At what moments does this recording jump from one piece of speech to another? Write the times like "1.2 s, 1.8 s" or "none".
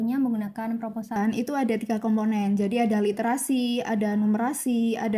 1.1 s